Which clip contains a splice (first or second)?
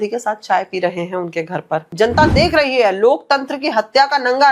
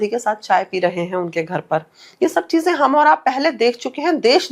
first